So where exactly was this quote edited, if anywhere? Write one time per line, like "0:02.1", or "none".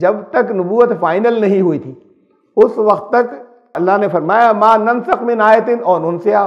0:03.7